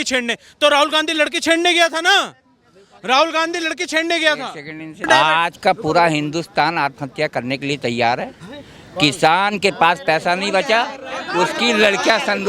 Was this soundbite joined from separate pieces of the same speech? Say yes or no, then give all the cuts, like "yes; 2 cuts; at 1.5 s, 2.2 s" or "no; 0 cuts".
yes; 1 cut; at 5.0 s